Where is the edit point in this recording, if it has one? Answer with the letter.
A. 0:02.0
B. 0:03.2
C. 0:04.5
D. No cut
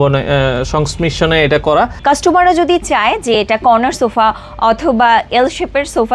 A